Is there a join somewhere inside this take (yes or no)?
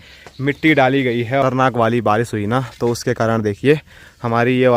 yes